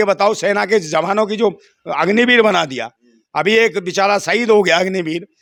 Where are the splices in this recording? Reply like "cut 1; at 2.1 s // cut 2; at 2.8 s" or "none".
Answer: none